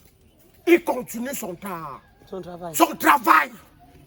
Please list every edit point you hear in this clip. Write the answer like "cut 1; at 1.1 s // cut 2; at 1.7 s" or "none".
none